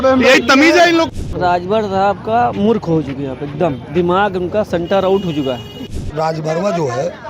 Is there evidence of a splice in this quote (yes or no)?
yes